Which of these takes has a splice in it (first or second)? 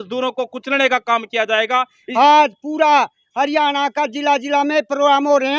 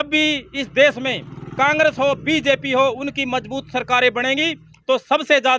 first